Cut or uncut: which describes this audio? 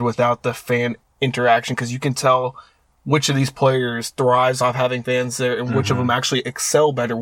uncut